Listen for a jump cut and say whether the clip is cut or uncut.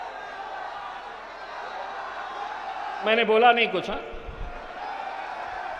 cut